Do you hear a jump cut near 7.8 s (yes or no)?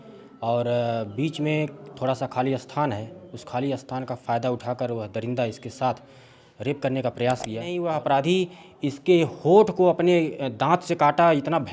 yes